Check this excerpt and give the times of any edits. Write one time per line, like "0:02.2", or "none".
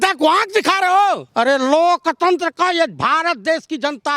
0:01.2